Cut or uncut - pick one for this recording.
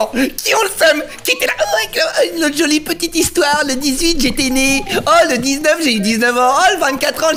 uncut